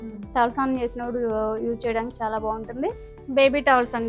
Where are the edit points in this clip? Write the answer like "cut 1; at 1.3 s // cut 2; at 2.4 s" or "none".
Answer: cut 1; at 3.1 s